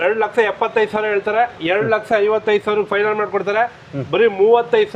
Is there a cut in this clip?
no; 0 cuts

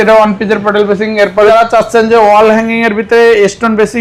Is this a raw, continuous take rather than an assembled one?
no; 1 cut; at 1.5 s

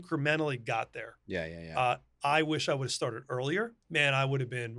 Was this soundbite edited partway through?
yes; 1 cut; at 3.8 s

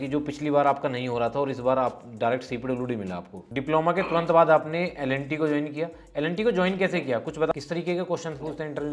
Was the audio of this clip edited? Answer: yes; 2 cuts; at 3.3 s, 7.5 s

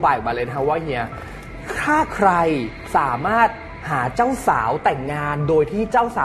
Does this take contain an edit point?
no; 0 cuts

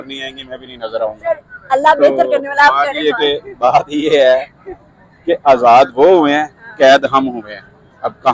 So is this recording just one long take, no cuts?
yes; 0 cuts

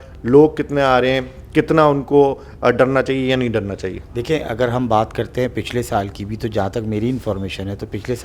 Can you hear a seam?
no; 0 cuts

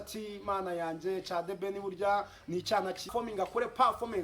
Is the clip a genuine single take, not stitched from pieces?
no; 1 cut; at 3.1 s

